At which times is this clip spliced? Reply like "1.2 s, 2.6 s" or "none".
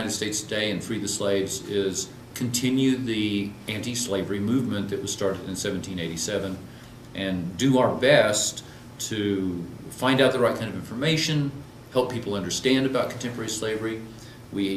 7.5 s

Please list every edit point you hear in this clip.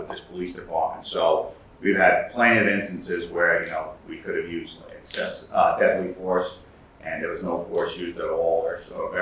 none

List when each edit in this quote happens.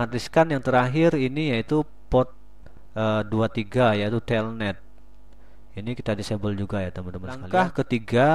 7.4 s

